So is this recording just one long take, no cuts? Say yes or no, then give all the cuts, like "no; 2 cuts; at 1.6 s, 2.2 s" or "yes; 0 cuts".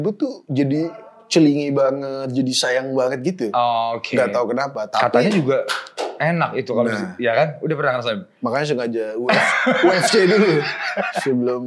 yes; 0 cuts